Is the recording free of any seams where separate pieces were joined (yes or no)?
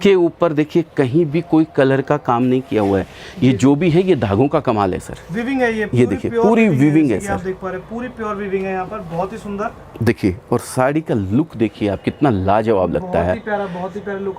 yes